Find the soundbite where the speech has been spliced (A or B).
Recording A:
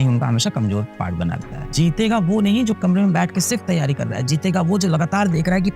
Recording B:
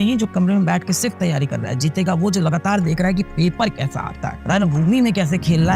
A